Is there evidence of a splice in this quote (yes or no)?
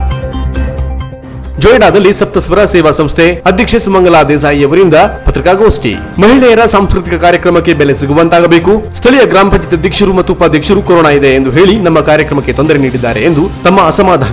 yes